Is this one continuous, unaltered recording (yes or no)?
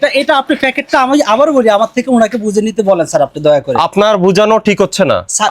yes